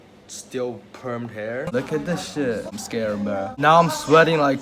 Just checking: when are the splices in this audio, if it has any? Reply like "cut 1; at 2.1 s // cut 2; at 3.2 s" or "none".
cut 1; at 1.7 s // cut 2; at 2.7 s